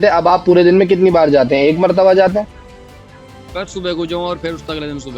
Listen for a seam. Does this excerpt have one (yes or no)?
no